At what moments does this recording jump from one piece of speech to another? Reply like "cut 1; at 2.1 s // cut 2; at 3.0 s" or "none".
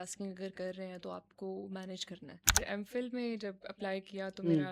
cut 1; at 2.6 s